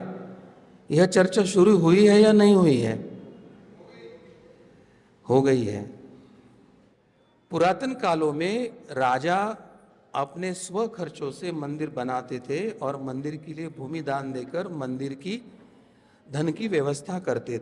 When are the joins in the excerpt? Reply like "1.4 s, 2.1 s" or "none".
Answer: 6.9 s